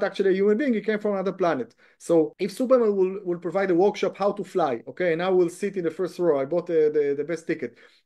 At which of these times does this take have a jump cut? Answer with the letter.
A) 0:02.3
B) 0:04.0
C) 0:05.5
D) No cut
A